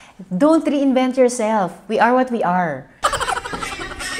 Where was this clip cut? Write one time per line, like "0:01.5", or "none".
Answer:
0:02.9